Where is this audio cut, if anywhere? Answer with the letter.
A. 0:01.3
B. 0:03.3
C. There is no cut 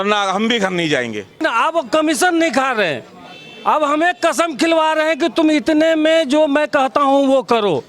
A